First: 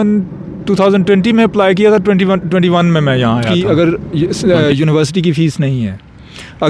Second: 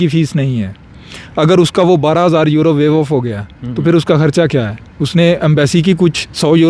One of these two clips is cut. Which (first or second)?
first